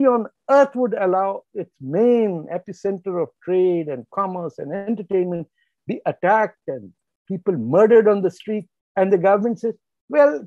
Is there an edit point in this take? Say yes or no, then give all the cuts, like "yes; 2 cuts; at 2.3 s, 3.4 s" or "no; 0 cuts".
no; 0 cuts